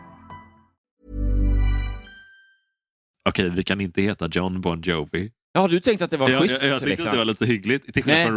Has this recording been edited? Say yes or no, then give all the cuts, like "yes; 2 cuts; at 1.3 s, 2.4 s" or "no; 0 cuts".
yes; 1 cut; at 3.0 s